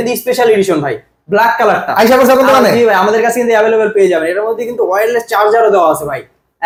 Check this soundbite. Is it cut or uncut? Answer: uncut